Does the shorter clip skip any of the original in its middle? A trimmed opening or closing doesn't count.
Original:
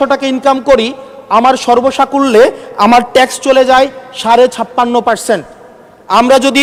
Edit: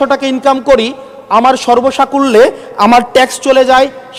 no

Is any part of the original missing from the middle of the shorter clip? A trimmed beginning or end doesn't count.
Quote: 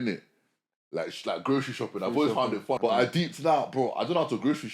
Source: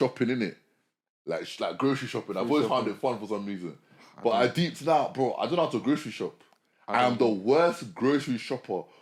yes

